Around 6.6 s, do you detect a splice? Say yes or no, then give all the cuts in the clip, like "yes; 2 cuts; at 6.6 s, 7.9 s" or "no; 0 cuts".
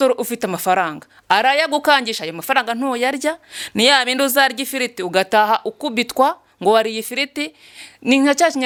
no; 0 cuts